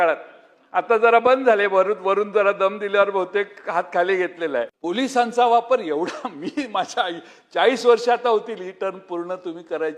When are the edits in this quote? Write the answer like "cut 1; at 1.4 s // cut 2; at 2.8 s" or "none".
cut 1; at 4.7 s